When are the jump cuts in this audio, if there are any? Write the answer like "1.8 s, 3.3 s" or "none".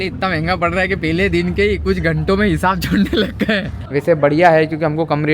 3.7 s